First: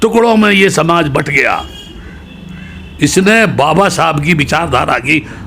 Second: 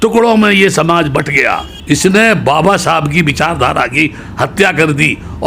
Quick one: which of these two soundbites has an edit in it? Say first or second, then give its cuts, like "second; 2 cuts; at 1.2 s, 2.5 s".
second; 1 cut; at 1.7 s